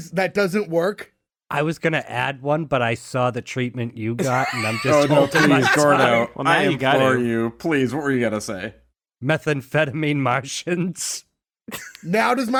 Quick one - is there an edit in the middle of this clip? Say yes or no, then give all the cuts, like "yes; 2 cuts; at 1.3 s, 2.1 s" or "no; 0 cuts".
no; 0 cuts